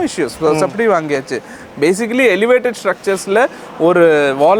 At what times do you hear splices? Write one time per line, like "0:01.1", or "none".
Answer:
none